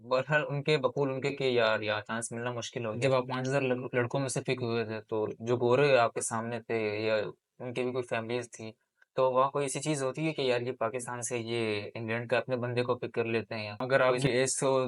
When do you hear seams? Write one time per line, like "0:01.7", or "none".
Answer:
0:02.9
0:13.8